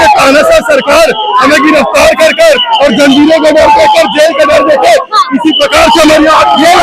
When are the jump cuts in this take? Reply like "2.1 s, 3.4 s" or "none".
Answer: none